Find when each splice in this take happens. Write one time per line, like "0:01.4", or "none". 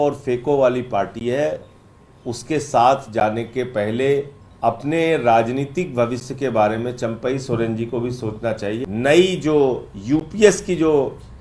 0:04.4
0:08.8